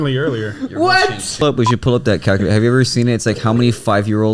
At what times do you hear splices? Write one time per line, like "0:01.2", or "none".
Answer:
0:01.4